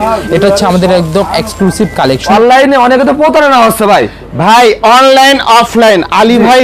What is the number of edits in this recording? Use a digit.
1